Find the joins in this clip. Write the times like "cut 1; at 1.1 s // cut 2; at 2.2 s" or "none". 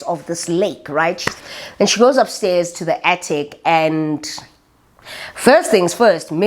cut 1; at 1.5 s